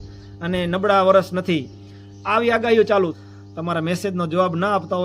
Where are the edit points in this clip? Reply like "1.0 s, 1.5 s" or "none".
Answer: 3.2 s